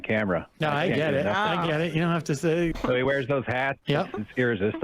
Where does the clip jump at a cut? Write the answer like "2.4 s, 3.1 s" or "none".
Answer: 2.7 s, 3.8 s